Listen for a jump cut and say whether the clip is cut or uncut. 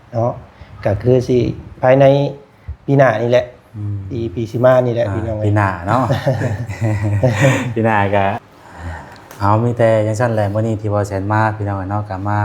cut